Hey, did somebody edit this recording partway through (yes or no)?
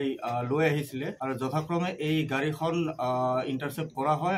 no